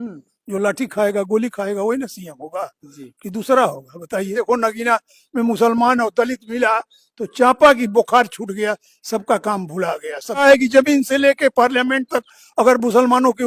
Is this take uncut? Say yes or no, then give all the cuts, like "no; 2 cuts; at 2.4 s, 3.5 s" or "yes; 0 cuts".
no; 2 cuts; at 4.3 s, 10.4 s